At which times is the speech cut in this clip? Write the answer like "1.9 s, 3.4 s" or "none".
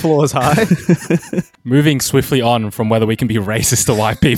1.5 s